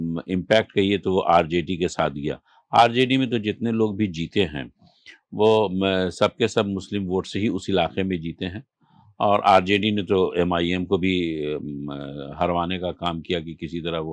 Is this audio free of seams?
yes; 0 cuts

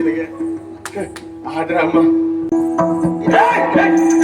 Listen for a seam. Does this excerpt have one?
yes; 1 cut; at 2.5 s

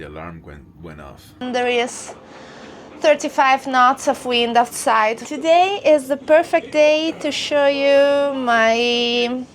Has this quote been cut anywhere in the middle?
yes; 2 cuts; at 1.4 s, 5.2 s

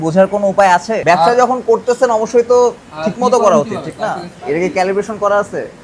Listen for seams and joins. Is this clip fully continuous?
no; 1 cut; at 4.3 s

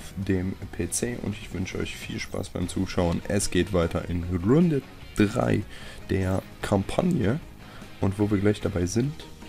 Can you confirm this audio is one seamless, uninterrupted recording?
no; 1 cut; at 8.4 s

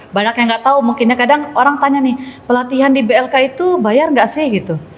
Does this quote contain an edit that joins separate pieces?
no; 0 cuts

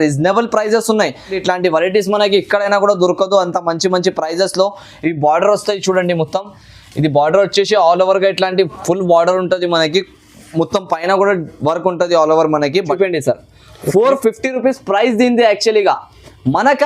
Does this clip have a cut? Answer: yes; 2 cuts; at 1.4 s, 13.0 s

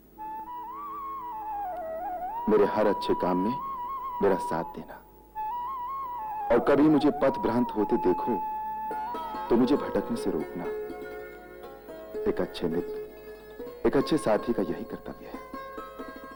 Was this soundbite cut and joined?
no; 0 cuts

